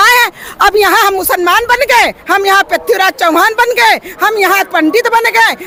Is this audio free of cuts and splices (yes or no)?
yes